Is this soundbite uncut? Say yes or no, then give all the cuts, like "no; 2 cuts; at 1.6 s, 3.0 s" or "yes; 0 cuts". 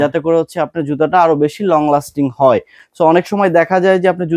yes; 0 cuts